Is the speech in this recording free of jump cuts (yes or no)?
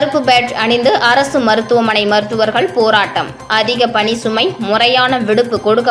yes